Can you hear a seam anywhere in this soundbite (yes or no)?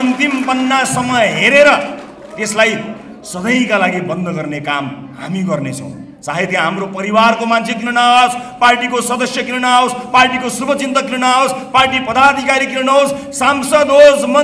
no